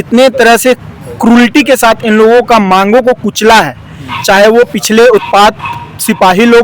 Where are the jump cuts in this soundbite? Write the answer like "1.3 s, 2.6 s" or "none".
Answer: none